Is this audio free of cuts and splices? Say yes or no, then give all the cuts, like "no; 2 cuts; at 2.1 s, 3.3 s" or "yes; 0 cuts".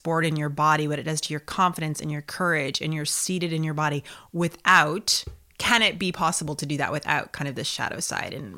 yes; 0 cuts